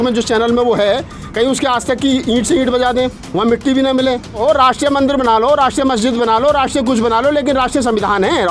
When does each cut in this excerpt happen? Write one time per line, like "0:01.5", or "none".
0:04.4